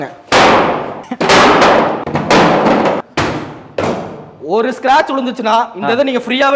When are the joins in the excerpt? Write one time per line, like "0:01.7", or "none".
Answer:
0:01.0
0:02.0
0:03.1